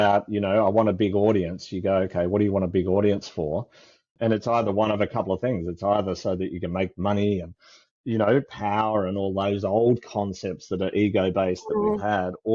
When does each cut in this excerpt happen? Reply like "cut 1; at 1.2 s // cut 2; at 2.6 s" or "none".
cut 1; at 4.1 s